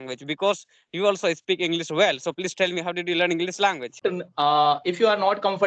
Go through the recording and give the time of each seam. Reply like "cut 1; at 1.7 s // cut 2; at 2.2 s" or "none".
cut 1; at 4.0 s